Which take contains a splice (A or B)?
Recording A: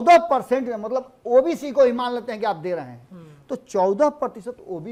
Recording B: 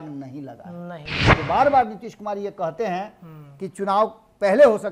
B